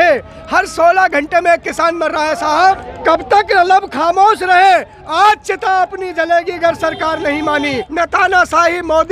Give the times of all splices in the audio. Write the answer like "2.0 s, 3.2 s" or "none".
2.9 s, 7.8 s